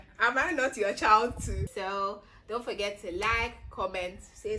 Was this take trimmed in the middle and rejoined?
yes; 1 cut; at 1.5 s

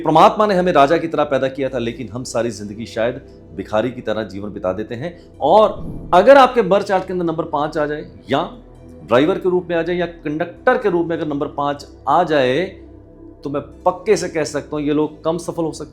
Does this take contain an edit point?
yes; 1 cut; at 5.9 s

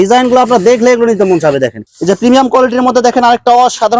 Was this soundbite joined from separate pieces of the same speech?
yes; 1 cut; at 1.8 s

